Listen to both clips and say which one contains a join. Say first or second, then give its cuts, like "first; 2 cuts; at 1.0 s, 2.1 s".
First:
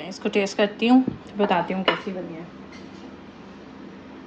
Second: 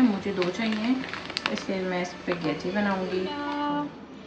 second; 1 cut; at 3.4 s